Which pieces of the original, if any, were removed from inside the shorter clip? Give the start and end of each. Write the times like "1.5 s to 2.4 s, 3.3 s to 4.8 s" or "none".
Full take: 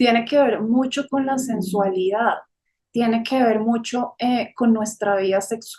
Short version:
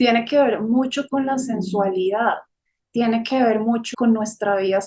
3.9 s to 4.5 s